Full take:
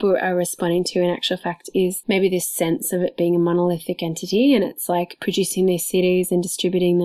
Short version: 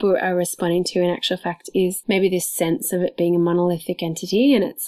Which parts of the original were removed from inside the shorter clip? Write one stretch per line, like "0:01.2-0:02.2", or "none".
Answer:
none